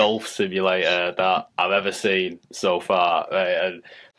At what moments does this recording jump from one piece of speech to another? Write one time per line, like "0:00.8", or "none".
none